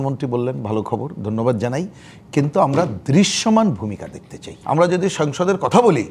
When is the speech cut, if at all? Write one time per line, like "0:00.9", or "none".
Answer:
0:04.5